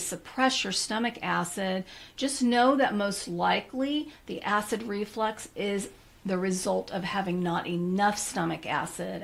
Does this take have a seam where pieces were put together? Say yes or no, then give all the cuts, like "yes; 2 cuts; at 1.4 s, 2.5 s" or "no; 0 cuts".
no; 0 cuts